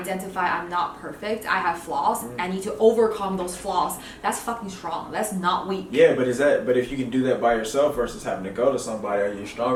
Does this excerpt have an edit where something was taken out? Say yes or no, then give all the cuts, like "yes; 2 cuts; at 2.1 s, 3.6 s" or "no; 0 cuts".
no; 0 cuts